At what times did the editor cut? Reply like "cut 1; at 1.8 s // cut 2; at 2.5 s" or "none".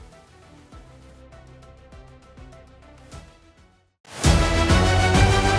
cut 1; at 3.8 s